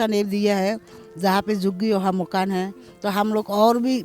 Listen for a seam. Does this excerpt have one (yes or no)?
no